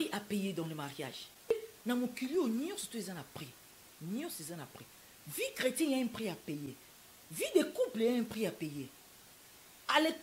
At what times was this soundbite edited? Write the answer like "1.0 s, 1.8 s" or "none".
1.5 s